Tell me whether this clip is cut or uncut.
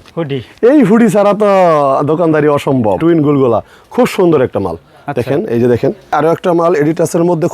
cut